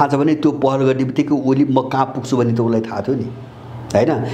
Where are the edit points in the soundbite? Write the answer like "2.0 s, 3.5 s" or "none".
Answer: none

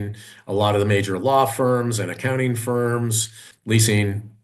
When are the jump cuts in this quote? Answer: 3.5 s

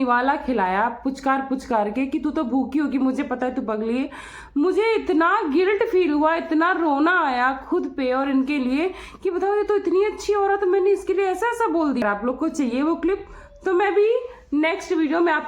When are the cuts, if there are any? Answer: 12.0 s

